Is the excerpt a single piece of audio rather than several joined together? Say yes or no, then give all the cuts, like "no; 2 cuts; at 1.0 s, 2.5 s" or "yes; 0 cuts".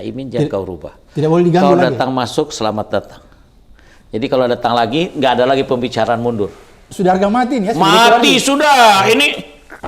yes; 0 cuts